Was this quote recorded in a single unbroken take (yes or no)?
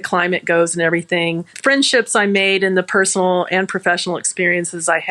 no